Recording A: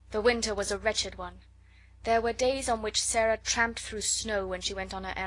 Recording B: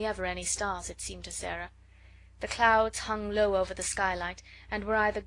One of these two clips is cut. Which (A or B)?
B